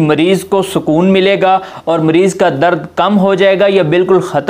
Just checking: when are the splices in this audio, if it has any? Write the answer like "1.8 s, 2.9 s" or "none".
none